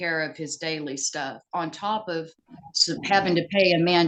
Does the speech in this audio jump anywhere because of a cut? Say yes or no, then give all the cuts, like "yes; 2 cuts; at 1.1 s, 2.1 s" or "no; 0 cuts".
no; 0 cuts